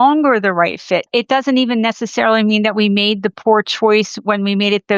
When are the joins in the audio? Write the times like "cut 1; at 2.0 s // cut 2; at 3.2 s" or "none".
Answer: cut 1; at 1.1 s